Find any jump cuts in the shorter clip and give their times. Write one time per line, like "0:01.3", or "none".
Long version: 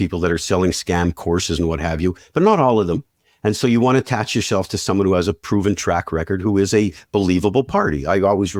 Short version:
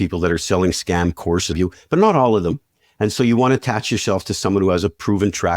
0:01.5